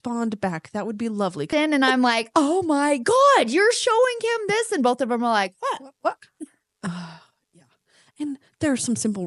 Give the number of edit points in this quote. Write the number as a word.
two